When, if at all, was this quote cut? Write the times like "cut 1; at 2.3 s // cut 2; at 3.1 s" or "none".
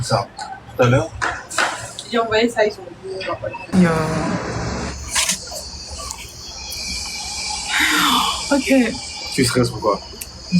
cut 1; at 3.7 s